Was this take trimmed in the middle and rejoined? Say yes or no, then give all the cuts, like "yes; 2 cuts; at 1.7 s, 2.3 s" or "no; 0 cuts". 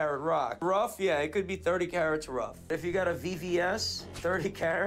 yes; 1 cut; at 2.6 s